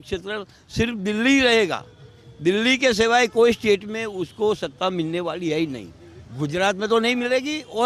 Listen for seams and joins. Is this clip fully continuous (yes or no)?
yes